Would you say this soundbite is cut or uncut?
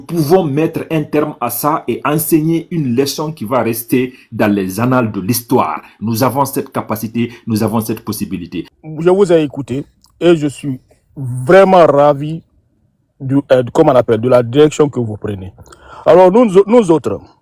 cut